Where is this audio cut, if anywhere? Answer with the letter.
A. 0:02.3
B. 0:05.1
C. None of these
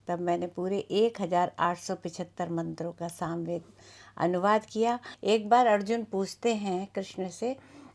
B